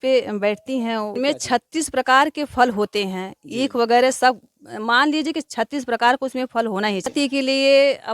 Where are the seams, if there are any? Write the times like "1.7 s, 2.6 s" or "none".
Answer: 1.1 s, 7.1 s